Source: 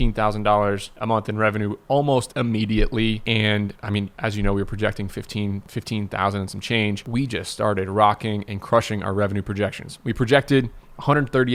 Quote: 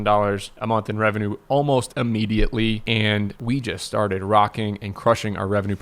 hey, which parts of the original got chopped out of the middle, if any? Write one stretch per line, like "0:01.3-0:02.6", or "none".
0:03.8-0:07.0